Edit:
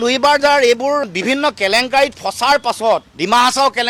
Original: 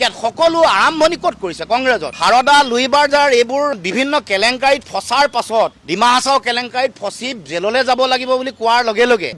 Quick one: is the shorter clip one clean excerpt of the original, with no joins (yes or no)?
yes